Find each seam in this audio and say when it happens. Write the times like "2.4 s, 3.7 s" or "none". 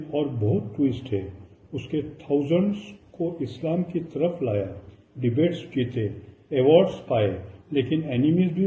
none